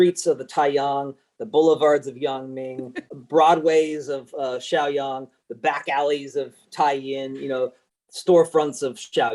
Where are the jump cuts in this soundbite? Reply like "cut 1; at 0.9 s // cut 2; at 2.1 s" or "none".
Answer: cut 1; at 3.1 s // cut 2; at 7.8 s